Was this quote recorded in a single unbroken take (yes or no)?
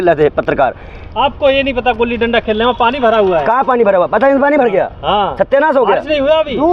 yes